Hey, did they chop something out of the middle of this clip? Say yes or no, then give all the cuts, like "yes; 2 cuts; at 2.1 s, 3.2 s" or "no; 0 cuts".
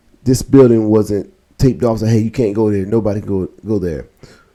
no; 0 cuts